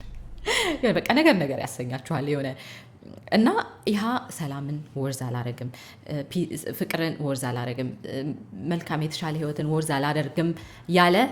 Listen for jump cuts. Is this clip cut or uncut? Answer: uncut